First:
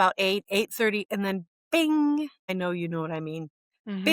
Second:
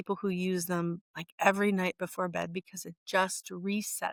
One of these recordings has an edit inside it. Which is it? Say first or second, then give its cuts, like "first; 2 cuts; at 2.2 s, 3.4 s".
first; 1 cut; at 2.4 s